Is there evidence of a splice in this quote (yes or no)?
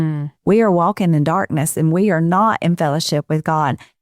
no